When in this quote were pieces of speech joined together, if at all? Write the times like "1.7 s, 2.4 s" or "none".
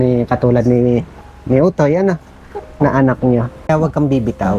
3.7 s